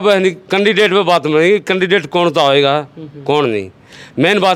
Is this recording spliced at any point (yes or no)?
no